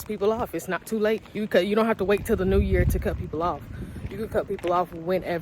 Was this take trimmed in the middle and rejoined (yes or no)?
yes